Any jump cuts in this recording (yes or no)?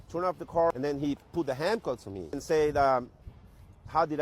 yes